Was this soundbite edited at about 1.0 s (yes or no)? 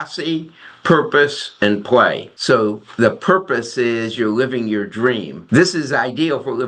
no